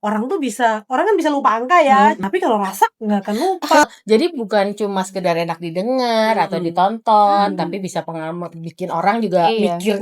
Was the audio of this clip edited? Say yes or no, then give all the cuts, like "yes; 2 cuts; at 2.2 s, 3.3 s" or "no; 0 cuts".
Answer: yes; 2 cuts; at 2.2 s, 3.8 s